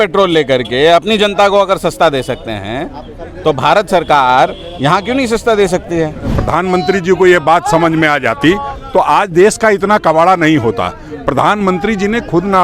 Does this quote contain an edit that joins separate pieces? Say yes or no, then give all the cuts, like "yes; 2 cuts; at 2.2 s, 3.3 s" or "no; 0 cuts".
yes; 1 cut; at 6.3 s